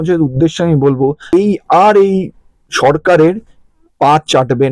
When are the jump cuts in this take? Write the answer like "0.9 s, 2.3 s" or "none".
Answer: 1.3 s